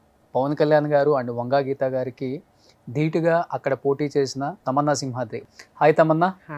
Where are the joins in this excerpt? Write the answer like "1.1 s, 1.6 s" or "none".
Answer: 4.6 s, 5.4 s